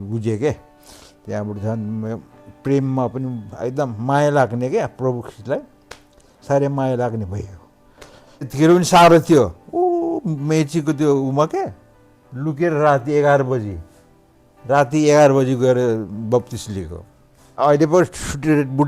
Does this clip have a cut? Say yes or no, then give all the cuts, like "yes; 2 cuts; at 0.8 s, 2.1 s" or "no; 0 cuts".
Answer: yes; 2 cuts; at 8.5 s, 17.6 s